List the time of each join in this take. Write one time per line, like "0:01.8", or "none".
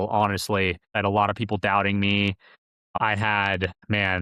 0:00.9
0:02.9